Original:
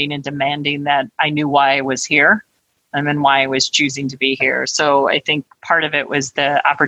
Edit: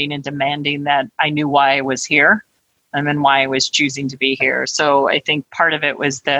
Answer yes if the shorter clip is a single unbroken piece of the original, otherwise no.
no